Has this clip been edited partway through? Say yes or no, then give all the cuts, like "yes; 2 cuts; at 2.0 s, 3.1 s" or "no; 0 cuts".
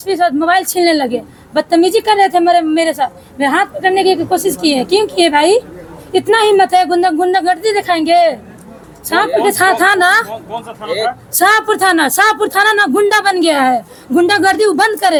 no; 0 cuts